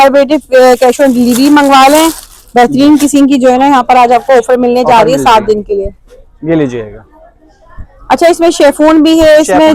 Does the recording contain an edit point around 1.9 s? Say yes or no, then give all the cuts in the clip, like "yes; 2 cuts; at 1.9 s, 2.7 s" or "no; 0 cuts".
no; 0 cuts